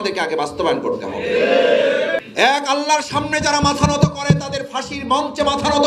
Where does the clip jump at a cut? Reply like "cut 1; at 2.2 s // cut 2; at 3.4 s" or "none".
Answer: cut 1; at 2.3 s